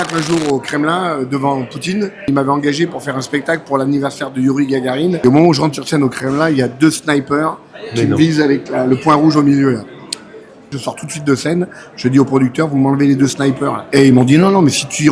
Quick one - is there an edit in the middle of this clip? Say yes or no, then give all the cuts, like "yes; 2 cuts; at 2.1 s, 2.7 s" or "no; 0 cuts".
yes; 4 cuts; at 2.3 s, 5.2 s, 10.8 s, 13.8 s